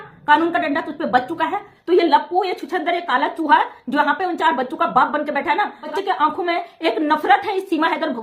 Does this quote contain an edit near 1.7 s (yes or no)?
yes